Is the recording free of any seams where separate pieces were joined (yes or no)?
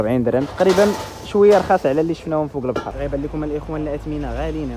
no